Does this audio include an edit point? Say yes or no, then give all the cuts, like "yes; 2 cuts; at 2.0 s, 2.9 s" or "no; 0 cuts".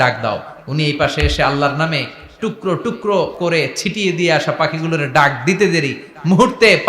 yes; 1 cut; at 3.3 s